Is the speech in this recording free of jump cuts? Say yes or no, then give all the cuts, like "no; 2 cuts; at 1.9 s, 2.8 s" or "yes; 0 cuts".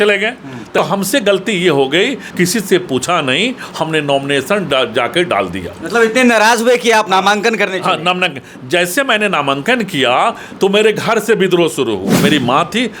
no; 3 cuts; at 0.8 s, 2.2 s, 12.2 s